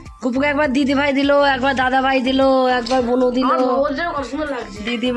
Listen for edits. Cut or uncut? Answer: uncut